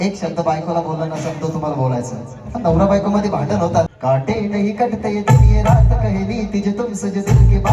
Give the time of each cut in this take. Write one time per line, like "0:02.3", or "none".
0:03.9